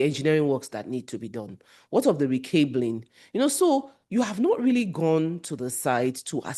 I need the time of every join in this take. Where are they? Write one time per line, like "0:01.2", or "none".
none